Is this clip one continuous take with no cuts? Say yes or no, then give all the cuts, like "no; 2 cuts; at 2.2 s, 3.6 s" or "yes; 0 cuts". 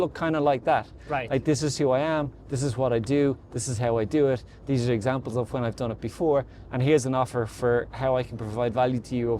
yes; 0 cuts